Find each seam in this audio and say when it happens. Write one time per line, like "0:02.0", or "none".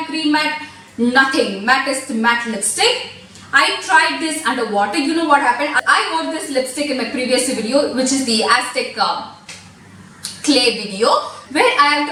none